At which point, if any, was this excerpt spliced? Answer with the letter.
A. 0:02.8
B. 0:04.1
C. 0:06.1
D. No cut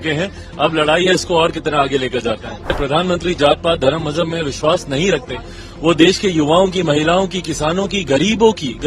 A